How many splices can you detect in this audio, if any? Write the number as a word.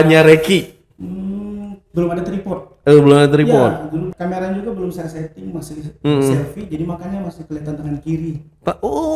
one